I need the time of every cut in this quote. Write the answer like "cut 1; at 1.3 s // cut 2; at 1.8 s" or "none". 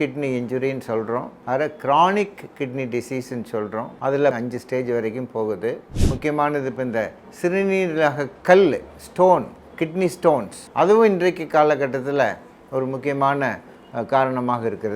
cut 1; at 1.3 s // cut 2; at 4.2 s // cut 3; at 5.9 s // cut 4; at 10.6 s

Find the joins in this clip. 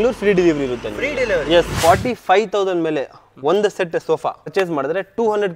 cut 1; at 1.7 s // cut 2; at 4.5 s

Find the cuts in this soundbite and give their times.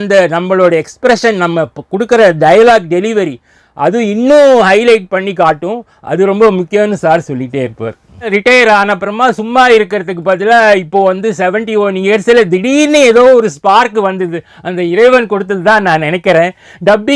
cut 1; at 8.3 s

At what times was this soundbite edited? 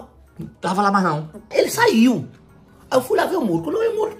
cut 1; at 1.5 s

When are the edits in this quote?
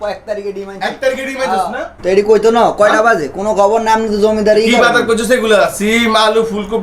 cut 1; at 2.0 s

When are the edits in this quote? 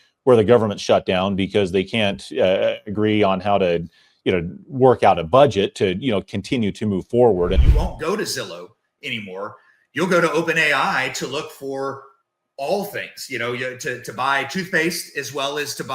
cut 1; at 7.6 s

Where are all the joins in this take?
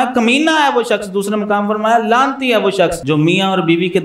cut 1; at 3.0 s

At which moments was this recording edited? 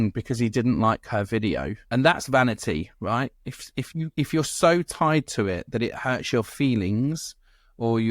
cut 1; at 1.8 s

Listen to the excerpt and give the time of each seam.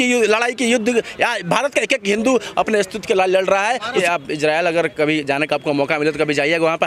cut 1; at 3.9 s

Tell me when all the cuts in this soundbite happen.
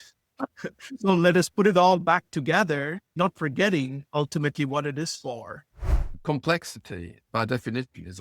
cut 1; at 6.2 s

